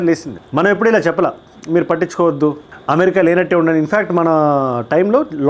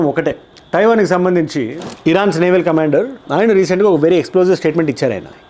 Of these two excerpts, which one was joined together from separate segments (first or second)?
second